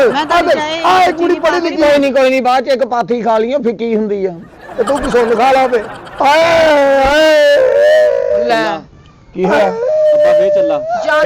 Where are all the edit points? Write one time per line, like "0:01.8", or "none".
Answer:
none